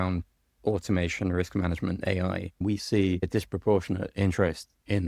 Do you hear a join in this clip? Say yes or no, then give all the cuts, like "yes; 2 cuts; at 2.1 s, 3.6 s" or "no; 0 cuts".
yes; 2 cuts; at 2.6 s, 3.3 s